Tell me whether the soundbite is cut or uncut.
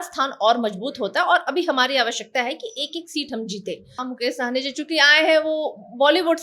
cut